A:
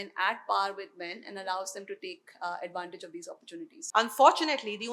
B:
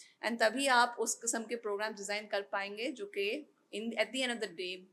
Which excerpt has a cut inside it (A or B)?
A